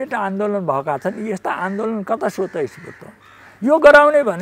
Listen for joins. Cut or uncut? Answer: uncut